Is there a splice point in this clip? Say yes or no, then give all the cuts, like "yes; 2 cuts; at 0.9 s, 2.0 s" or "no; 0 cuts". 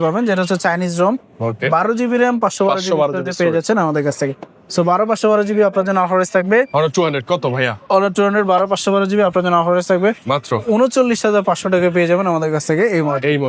no; 0 cuts